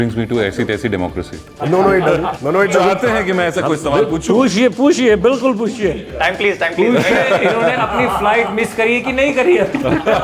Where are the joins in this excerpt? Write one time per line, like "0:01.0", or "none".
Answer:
0:01.4
0:02.5